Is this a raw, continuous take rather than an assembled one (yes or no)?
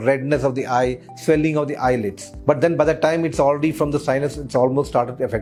yes